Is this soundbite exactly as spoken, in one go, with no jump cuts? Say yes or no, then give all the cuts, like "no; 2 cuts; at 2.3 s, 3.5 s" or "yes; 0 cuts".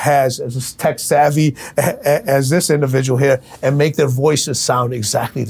yes; 0 cuts